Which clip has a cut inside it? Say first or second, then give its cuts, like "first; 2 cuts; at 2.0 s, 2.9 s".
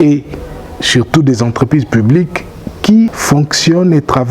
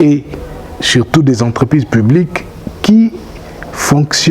first; 1 cut; at 3.2 s